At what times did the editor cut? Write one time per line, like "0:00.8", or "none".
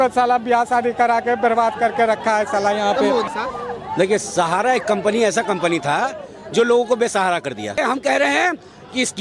0:03.3
0:07.8

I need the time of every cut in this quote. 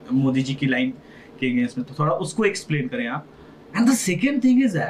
none

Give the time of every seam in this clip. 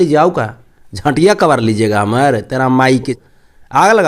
none

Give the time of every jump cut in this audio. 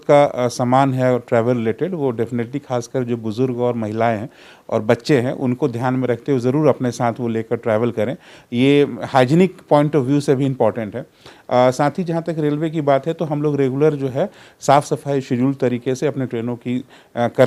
none

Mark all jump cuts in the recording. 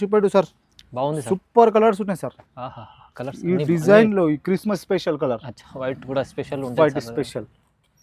none

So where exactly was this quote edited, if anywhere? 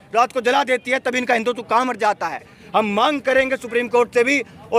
0:02.6

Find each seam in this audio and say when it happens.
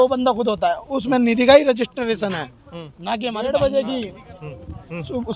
0:03.4

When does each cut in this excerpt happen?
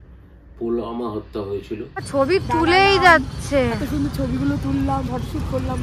0:02.0

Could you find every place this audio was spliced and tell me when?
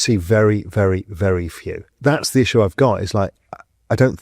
0:01.8

